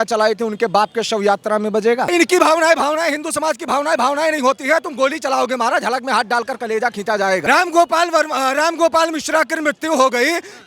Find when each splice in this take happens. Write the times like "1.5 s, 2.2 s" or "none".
2.1 s, 7.4 s